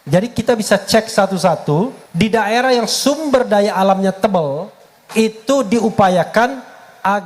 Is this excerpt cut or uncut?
cut